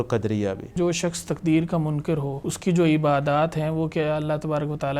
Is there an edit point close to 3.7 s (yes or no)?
no